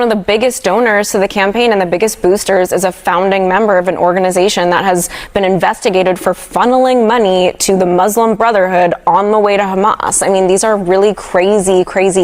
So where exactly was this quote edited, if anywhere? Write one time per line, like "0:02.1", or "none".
none